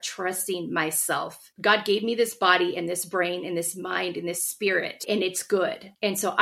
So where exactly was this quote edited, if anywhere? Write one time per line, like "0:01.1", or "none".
0:05.0